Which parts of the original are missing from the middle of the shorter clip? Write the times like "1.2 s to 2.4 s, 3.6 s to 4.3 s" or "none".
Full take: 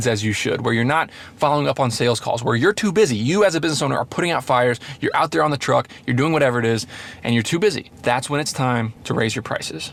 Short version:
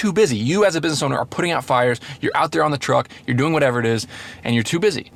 none